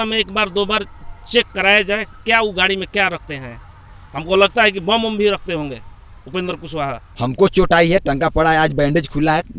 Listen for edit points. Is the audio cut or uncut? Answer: cut